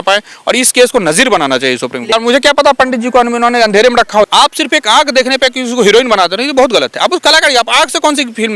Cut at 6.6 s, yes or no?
no